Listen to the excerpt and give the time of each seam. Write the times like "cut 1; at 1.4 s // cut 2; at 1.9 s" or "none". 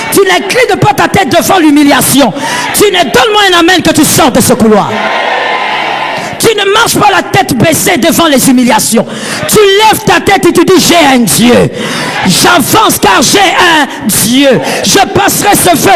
none

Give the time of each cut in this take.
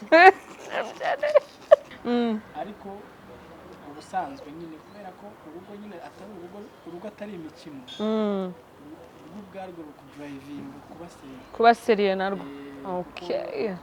cut 1; at 1.9 s

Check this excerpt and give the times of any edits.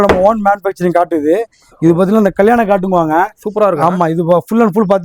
none

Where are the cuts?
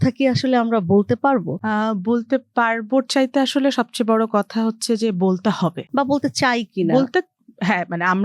none

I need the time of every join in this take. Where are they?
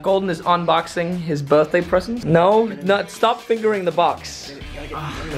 cut 1; at 2.2 s

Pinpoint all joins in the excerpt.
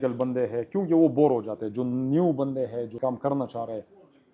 cut 1; at 2.9 s

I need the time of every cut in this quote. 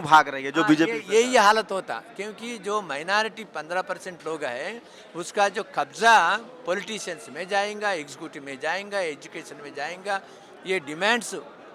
none

